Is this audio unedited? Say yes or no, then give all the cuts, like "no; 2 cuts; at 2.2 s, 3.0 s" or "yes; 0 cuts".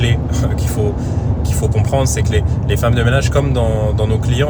yes; 0 cuts